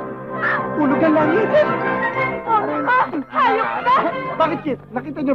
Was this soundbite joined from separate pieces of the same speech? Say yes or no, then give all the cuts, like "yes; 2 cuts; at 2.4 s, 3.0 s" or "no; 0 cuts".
yes; 1 cut; at 4.3 s